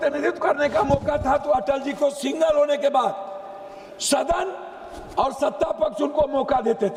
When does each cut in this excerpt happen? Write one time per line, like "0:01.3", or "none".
none